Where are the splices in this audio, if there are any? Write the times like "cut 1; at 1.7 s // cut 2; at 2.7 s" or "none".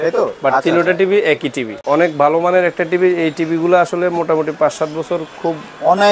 cut 1; at 1.7 s